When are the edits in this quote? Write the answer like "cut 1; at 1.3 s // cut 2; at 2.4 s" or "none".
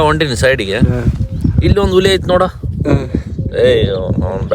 none